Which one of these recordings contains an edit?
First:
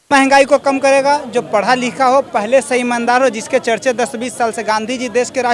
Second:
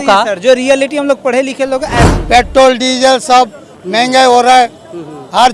second; 1 cut; at 2.1 s

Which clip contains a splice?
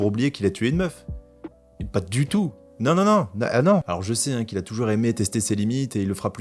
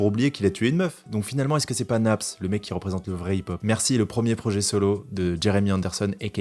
second; 2 cuts; at 1.0 s, 3.6 s

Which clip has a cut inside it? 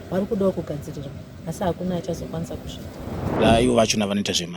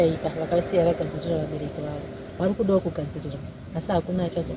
first; 1 cut; at 3.3 s

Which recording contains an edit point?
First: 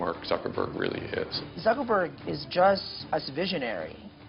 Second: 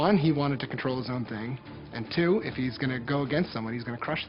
first; 2 cuts; at 1.4 s, 2.9 s

